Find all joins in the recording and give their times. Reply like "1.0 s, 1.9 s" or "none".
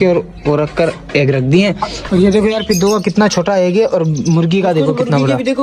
1.9 s